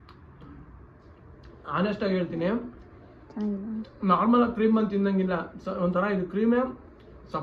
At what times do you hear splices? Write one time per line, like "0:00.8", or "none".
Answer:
none